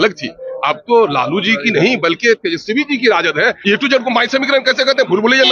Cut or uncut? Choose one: cut